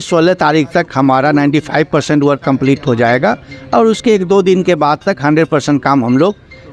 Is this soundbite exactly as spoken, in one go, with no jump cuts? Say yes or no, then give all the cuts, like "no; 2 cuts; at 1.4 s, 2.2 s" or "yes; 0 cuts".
yes; 0 cuts